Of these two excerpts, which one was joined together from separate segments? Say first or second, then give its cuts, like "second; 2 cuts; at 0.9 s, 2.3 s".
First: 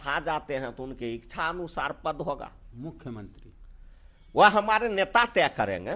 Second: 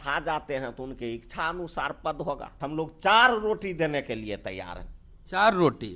second; 1 cut; at 2.5 s